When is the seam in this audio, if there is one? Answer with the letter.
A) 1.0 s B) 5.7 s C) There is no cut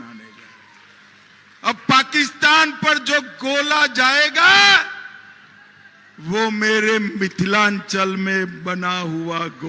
C